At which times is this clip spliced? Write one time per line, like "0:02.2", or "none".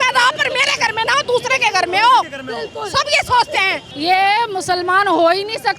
0:03.8